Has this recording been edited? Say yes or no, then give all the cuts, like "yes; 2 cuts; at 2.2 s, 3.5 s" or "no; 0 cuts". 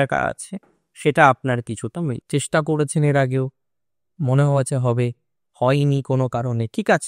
yes; 1 cut; at 2.2 s